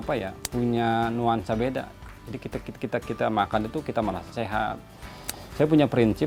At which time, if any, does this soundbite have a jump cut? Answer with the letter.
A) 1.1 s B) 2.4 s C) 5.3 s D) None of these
D